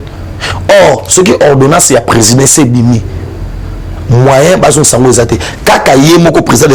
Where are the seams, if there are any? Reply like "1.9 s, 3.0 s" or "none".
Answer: none